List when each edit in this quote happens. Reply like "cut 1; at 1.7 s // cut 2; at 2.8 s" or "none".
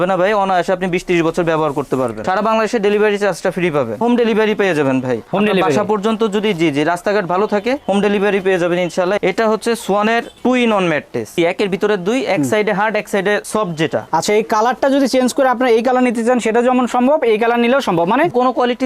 cut 1; at 2.2 s // cut 2; at 4.0 s // cut 3; at 9.2 s // cut 4; at 11.3 s // cut 5; at 14.1 s